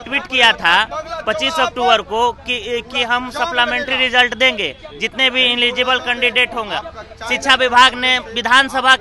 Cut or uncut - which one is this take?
uncut